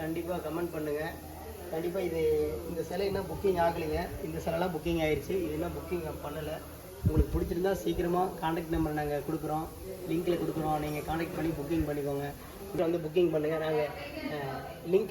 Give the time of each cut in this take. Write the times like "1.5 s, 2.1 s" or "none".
12.8 s